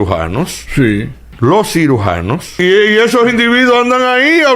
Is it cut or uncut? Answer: cut